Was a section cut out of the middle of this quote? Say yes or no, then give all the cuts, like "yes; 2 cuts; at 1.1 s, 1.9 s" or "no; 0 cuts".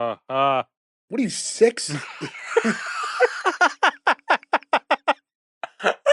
no; 0 cuts